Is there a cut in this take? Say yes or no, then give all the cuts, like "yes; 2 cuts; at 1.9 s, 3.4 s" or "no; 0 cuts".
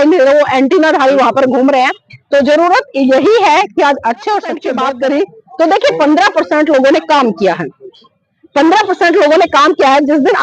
yes; 1 cut; at 4.7 s